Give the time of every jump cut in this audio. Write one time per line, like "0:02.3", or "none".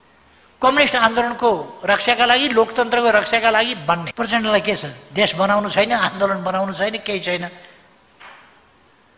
0:04.1